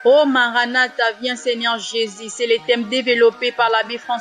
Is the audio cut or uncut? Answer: uncut